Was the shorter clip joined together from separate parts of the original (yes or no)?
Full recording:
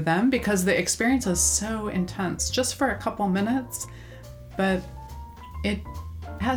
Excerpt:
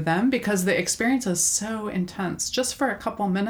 no